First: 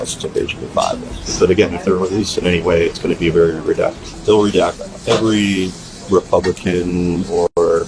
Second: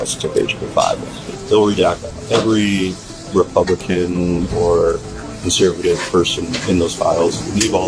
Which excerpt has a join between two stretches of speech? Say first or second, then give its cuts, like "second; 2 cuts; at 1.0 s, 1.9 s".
second; 2 cuts; at 1.2 s, 4.7 s